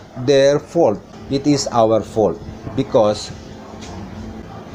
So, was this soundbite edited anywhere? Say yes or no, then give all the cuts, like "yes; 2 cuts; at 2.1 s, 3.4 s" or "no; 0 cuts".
no; 0 cuts